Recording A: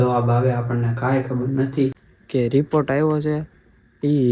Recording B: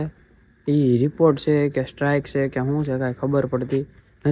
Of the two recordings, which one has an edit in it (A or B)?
A